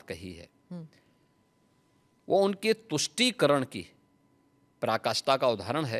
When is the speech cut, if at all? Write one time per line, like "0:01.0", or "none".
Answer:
none